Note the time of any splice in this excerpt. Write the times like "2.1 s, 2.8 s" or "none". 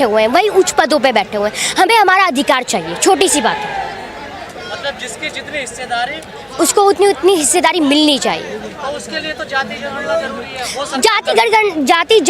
none